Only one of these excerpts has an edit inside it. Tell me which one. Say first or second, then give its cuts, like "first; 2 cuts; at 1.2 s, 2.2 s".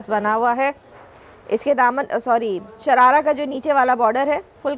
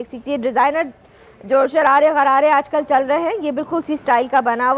first; 1 cut; at 0.9 s